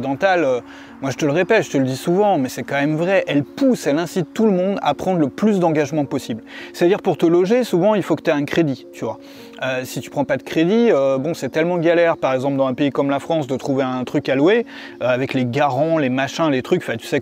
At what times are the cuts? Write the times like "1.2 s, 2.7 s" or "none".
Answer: none